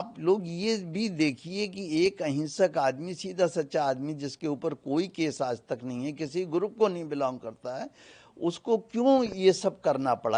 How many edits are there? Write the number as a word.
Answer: zero